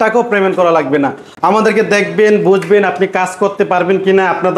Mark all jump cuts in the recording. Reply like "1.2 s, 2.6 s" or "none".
none